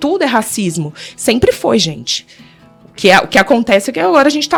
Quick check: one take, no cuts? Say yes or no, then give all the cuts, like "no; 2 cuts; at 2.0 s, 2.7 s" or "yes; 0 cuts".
yes; 0 cuts